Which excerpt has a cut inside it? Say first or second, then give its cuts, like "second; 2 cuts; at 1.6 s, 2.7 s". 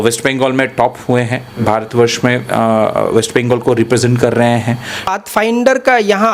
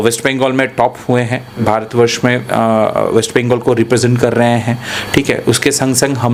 first; 1 cut; at 5.1 s